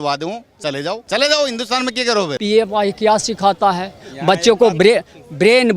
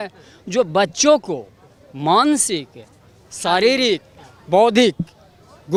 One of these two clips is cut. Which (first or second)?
first